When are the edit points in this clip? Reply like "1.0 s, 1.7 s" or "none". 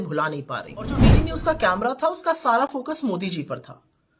1.1 s